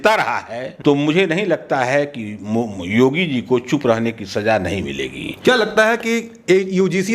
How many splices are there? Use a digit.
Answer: 0